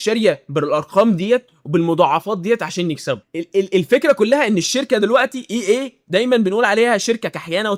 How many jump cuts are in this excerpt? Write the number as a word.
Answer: zero